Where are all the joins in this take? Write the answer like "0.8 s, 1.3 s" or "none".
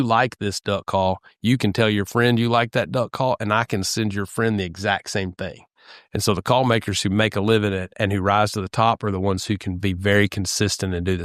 none